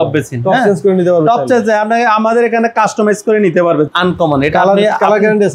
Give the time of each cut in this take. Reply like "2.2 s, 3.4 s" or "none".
3.9 s